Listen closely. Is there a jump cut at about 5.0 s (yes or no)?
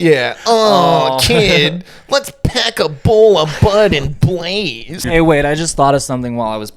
yes